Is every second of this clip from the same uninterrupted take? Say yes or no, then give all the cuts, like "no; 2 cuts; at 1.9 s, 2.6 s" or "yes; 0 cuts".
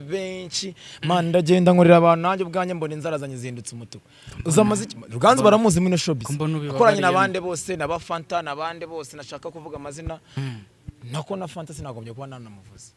yes; 0 cuts